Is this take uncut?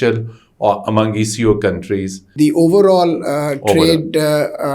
no; 1 cut; at 2.3 s

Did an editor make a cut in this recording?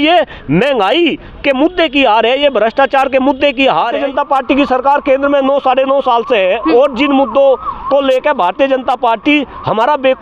yes; 1 cut; at 4.0 s

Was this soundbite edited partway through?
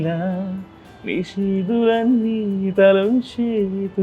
no; 0 cuts

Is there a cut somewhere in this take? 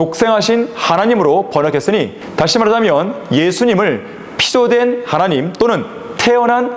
yes; 1 cut; at 2.2 s

